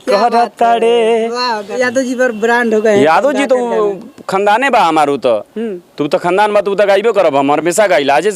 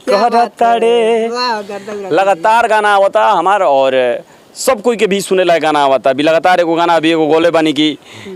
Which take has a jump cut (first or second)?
first